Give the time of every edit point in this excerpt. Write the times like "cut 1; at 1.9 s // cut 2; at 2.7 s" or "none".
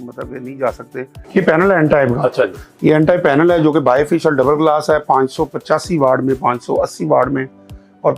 cut 1; at 1.2 s